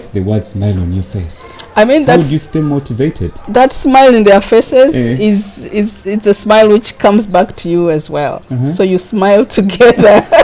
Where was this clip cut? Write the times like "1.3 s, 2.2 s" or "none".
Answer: none